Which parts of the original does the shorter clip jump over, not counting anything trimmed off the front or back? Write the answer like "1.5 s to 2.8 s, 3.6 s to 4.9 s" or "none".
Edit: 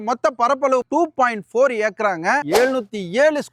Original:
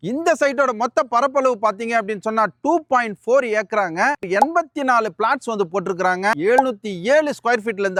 1.6 s to 2.6 s, 4.2 s to 6.4 s